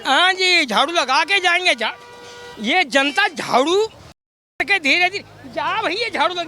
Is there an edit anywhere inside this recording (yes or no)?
no